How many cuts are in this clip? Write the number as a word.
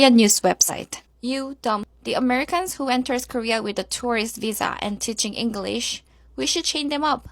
two